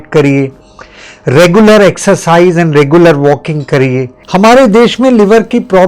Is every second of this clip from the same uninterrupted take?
no; 1 cut; at 4.2 s

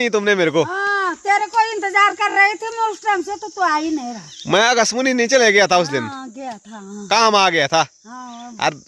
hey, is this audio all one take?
yes; 0 cuts

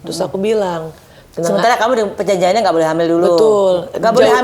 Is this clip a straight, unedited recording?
yes; 0 cuts

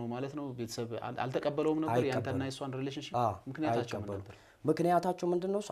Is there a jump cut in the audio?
no; 0 cuts

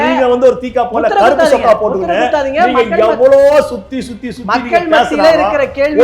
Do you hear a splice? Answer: no; 0 cuts

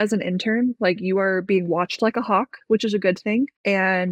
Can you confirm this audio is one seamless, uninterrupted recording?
yes; 0 cuts

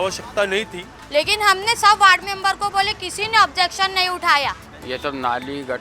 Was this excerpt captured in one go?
no; 2 cuts; at 0.9 s, 4.7 s

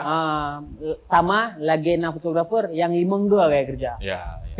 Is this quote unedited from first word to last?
yes; 0 cuts

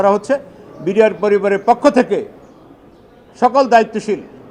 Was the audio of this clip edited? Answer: no; 0 cuts

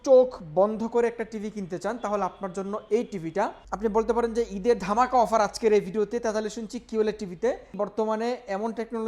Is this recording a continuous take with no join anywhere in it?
no; 2 cuts; at 3.6 s, 7.7 s

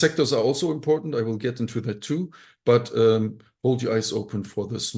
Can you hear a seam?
no; 0 cuts

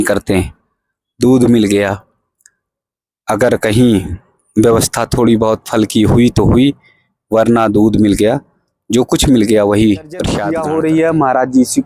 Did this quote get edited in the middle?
yes; 1 cut; at 10.4 s

